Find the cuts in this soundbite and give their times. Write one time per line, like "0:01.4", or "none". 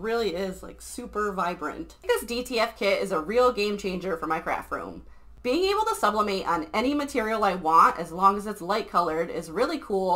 0:02.0